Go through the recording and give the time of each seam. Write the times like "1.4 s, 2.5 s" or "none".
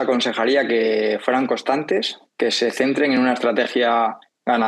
2.2 s